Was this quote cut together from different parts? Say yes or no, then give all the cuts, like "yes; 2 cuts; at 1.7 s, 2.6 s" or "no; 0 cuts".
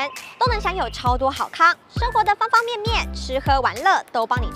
no; 0 cuts